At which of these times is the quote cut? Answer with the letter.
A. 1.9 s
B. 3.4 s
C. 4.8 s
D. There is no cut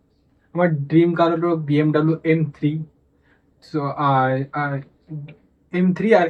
D